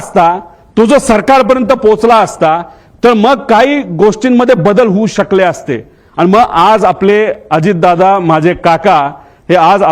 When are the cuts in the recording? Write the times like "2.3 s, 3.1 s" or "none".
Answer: none